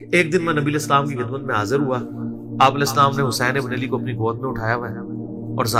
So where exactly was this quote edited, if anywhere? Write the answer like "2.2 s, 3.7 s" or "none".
none